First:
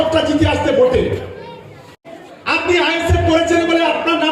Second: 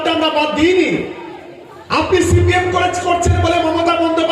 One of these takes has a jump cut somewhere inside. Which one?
first; 1 cut; at 1.8 s

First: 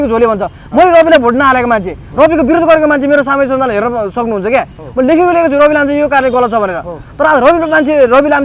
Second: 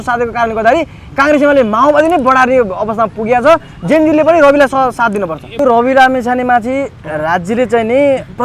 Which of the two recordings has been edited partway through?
second; 1 cut; at 5.5 s

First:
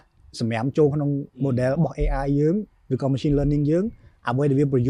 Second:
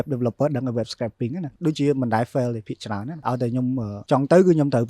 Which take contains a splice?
second; 2 cuts; at 1.4 s, 3.5 s

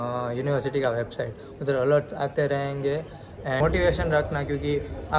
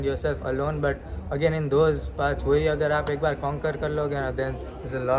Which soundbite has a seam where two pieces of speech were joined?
first; 1 cut; at 3.6 s

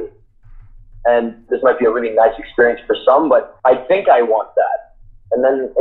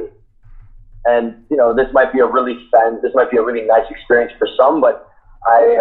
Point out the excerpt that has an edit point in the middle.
first; 2 cuts; at 1.4 s, 3.5 s

